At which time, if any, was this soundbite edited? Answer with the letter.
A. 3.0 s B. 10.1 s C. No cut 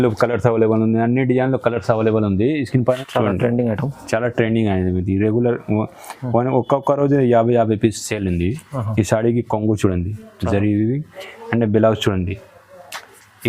A